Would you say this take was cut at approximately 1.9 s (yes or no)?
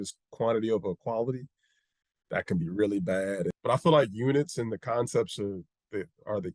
no